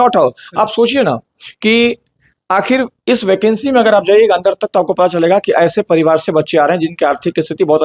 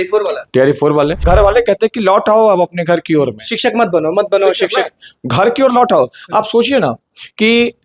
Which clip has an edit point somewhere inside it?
second; 1 cut; at 1.2 s

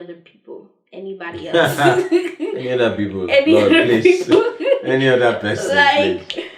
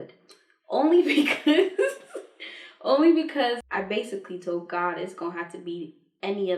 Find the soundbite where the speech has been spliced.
second; 1 cut; at 3.6 s

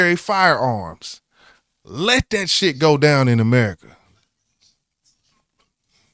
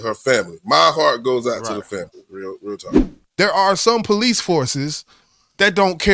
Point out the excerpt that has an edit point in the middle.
second; 1 cut; at 3.1 s

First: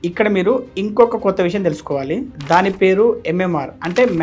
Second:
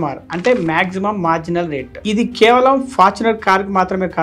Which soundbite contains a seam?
second; 1 cut; at 1.9 s

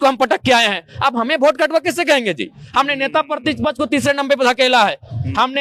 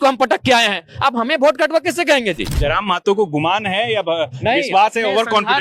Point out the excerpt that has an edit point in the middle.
second; 1 cut; at 2.5 s

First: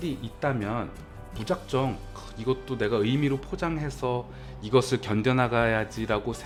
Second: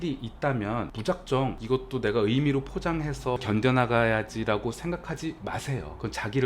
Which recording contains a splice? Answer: second; 3 cuts; at 0.9 s, 1.6 s, 3.4 s

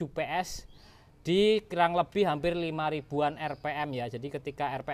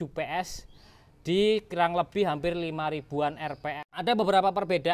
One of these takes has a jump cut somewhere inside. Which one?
second; 1 cut; at 3.8 s

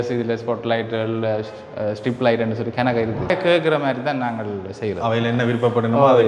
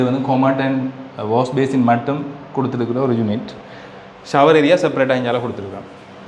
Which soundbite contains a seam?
first; 1 cut; at 3.3 s

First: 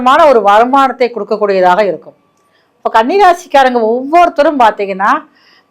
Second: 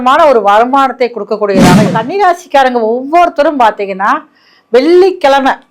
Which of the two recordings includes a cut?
second; 1 cut; at 1.9 s

